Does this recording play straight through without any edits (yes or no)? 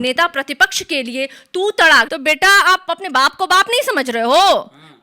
no